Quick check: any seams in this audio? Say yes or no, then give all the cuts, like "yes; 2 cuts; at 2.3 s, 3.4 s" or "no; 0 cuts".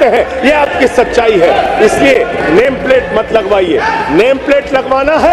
no; 0 cuts